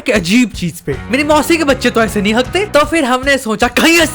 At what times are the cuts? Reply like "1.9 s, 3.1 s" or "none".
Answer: 1.0 s, 2.7 s